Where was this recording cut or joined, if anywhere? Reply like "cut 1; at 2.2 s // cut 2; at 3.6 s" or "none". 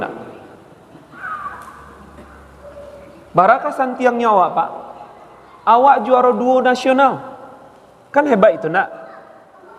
cut 1; at 1.2 s

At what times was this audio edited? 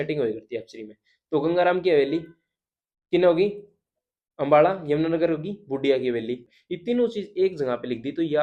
cut 1; at 6.5 s

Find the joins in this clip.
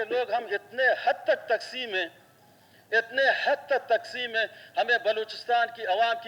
none

